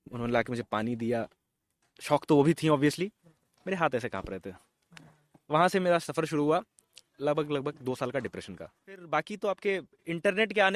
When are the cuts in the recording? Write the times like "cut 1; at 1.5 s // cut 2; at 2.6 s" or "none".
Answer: cut 1; at 9.0 s